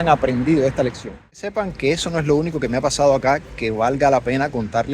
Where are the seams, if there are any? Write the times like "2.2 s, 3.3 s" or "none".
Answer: 1.5 s